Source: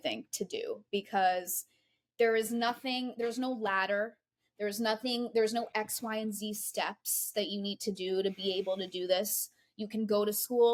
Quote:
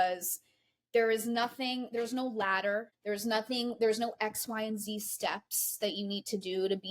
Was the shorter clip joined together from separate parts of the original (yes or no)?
yes